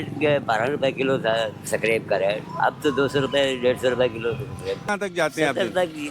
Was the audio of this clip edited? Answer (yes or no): yes